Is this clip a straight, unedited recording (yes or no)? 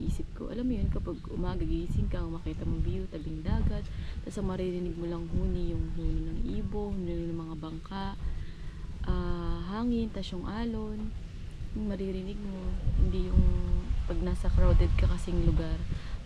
yes